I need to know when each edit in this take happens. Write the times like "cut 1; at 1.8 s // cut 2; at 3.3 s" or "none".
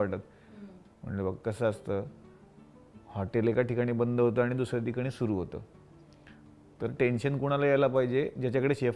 none